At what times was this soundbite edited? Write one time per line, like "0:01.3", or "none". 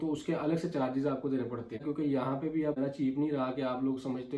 0:01.8
0:02.8